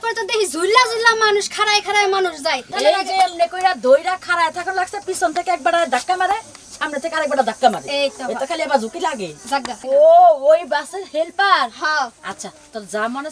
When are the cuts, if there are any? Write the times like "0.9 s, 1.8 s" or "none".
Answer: 2.7 s, 9.8 s

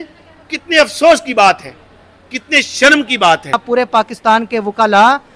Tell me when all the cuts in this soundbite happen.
3.6 s

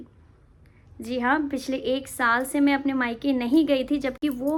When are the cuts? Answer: none

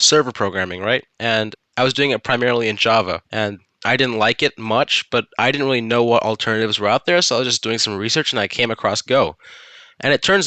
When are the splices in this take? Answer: 1.4 s, 3.2 s

